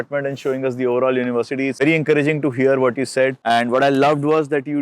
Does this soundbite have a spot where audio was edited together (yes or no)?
yes